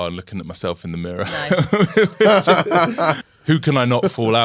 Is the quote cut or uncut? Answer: cut